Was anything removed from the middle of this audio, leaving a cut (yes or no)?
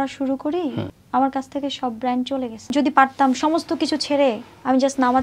yes